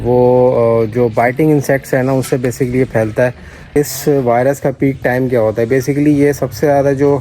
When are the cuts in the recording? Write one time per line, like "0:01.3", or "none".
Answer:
0:03.7